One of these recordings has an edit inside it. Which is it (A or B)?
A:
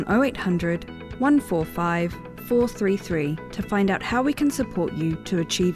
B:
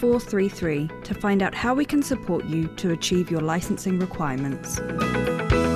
B